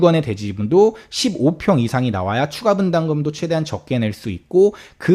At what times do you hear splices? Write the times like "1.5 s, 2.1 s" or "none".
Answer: none